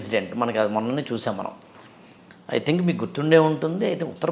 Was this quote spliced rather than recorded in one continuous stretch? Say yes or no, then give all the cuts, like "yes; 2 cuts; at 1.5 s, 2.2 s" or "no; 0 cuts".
no; 0 cuts